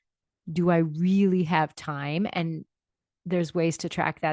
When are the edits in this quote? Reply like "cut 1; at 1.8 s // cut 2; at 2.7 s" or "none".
none